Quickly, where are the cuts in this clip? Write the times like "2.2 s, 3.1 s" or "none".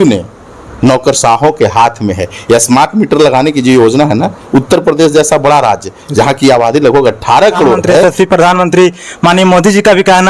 8.0 s